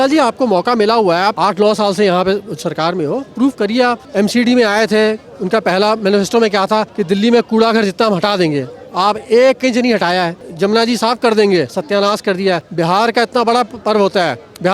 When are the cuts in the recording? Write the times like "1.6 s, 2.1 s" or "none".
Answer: 1.4 s, 4.0 s, 6.9 s, 10.4 s, 12.7 s